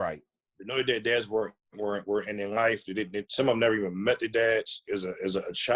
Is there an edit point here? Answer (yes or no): yes